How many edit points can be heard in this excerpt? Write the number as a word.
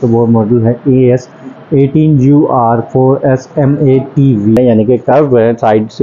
one